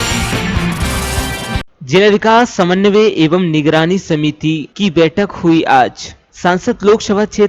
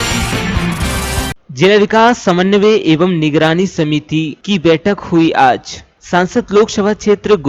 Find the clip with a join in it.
second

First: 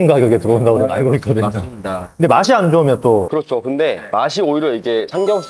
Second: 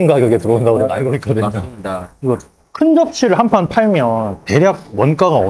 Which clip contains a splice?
second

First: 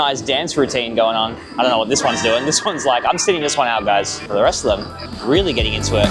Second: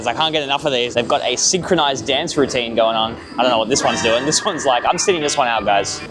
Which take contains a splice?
second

